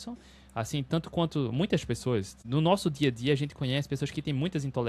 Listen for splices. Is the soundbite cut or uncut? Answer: cut